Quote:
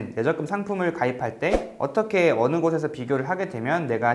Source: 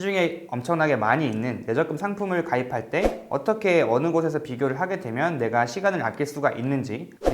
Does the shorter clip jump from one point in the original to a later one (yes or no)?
no